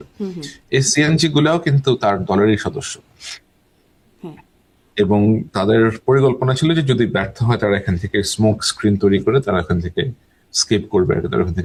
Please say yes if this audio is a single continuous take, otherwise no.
yes